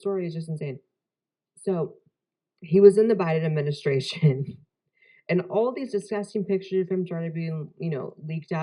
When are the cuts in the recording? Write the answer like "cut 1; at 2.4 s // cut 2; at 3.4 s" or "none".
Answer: cut 1; at 5.8 s